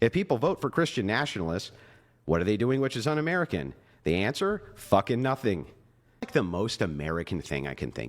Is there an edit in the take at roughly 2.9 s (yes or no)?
no